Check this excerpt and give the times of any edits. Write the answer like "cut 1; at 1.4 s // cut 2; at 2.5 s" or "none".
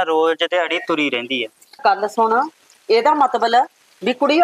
cut 1; at 1.8 s